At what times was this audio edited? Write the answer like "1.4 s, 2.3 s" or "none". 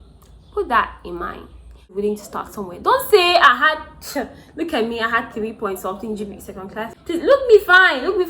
1.9 s, 6.9 s